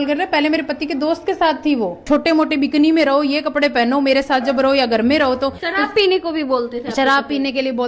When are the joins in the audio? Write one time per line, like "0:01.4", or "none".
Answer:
0:02.0
0:05.6